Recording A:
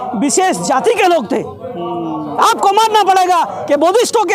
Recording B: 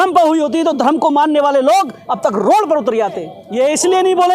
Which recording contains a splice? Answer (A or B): B